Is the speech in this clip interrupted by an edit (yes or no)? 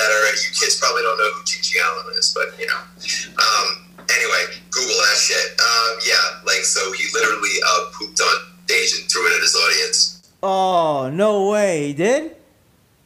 no